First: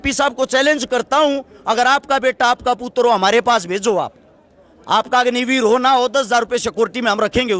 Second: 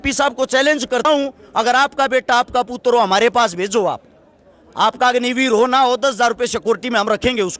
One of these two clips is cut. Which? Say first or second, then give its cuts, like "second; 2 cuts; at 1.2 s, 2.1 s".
second; 1 cut; at 1.0 s